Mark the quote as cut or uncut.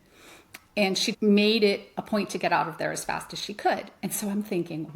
cut